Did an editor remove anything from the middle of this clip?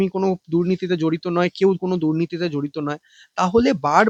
no; 0 cuts

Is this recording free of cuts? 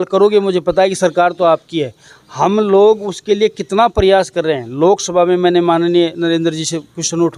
yes; 0 cuts

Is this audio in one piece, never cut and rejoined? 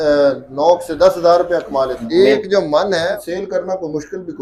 no; 2 cuts; at 2.0 s, 3.2 s

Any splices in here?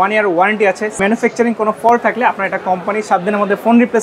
yes; 1 cut; at 1.0 s

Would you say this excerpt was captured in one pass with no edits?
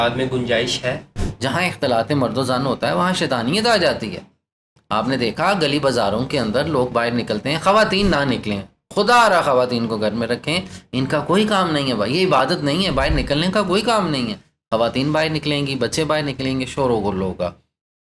no; 1 cut; at 1.2 s

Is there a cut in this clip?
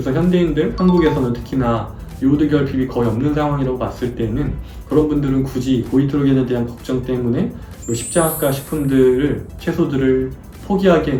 no; 0 cuts

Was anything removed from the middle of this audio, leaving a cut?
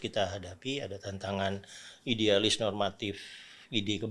no; 0 cuts

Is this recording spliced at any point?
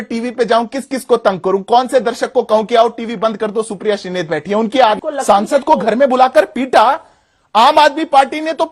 yes; 1 cut; at 5.0 s

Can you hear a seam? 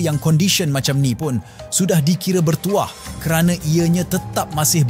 no; 0 cuts

